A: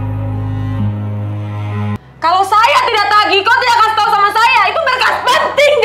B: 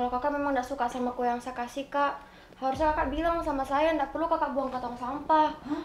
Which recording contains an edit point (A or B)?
A